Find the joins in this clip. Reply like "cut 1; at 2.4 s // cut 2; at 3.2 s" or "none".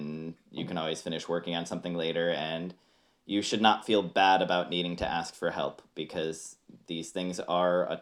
none